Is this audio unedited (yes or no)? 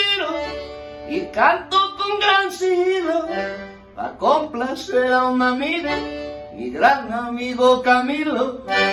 yes